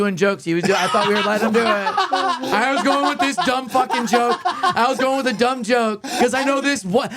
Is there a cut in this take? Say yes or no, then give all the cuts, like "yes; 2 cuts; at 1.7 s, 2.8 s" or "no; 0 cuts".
yes; 1 cut; at 6.0 s